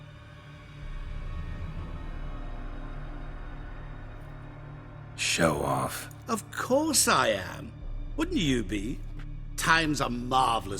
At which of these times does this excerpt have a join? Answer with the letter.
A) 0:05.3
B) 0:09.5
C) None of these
A